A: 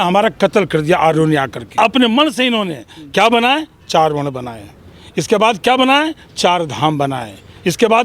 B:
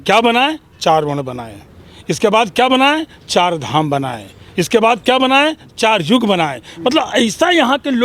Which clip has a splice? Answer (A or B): A